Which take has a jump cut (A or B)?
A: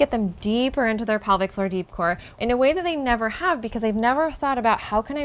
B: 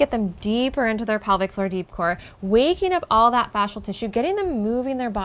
A